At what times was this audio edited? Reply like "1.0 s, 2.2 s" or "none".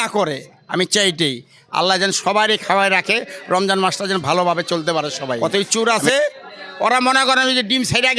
5.2 s